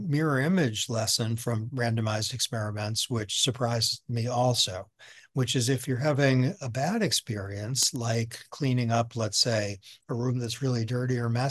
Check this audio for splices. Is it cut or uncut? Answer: uncut